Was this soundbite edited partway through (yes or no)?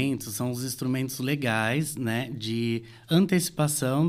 no